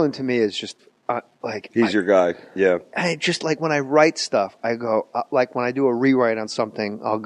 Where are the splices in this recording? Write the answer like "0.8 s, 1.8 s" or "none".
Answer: 2.7 s